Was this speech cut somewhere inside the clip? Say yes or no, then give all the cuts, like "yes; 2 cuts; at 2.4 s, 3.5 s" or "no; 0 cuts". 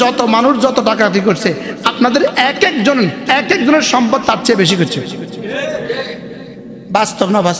no; 0 cuts